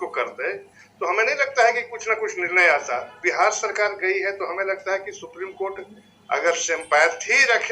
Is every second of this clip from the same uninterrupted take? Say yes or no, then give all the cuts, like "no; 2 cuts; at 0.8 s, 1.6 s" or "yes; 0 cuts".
no; 1 cut; at 3.1 s